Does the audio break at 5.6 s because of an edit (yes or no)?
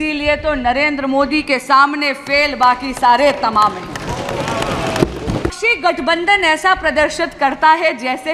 yes